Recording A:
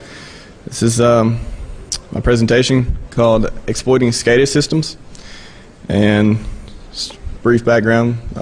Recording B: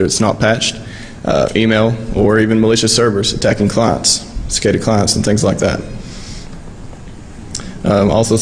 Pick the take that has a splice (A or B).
B